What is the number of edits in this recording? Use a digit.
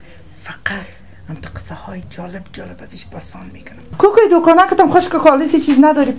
1